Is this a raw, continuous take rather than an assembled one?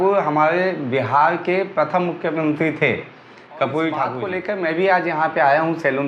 no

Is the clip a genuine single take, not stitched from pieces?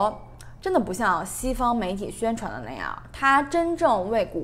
yes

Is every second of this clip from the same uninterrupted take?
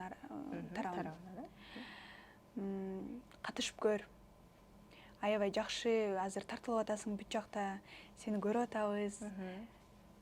yes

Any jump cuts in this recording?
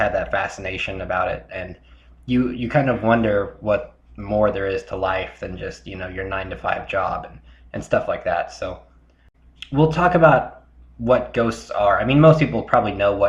no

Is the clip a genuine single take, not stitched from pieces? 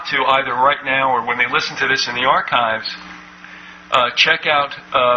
no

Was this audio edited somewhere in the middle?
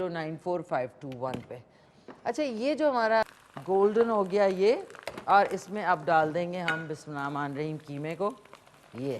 yes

